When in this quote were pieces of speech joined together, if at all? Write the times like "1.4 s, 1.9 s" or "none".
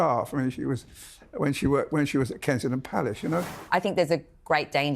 3.6 s